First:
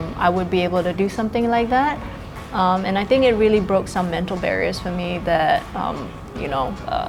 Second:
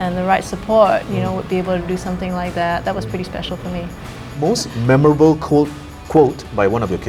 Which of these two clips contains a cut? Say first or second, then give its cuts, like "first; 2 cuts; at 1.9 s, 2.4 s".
second; 1 cut; at 4.4 s